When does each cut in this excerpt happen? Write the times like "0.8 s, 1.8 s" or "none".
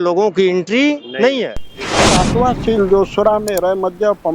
2.1 s